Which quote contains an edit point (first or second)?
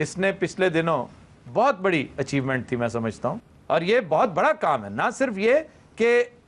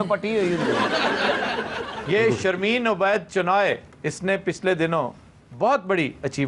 first